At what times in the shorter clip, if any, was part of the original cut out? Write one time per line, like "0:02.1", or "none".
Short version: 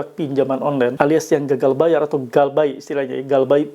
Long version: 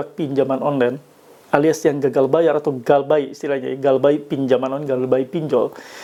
0:00.9